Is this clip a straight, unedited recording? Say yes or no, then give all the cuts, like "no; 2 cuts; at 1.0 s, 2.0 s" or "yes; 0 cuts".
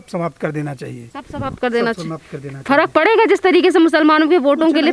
yes; 0 cuts